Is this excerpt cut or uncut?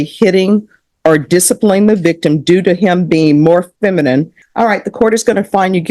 cut